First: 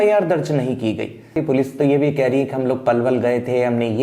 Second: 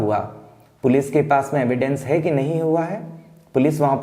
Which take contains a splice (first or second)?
first